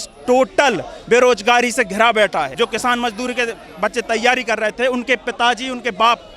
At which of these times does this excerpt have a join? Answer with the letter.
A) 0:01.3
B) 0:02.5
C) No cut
B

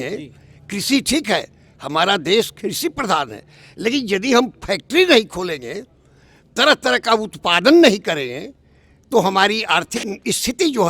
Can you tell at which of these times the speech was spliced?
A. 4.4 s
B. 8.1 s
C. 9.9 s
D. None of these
D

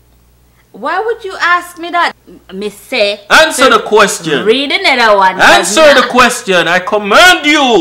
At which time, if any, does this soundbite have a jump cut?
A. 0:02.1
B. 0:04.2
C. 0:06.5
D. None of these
A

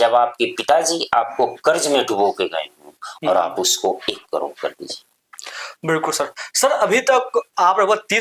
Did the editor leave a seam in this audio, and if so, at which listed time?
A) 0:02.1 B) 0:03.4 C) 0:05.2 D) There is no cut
D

